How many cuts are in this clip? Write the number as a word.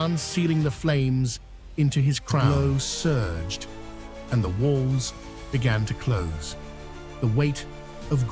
one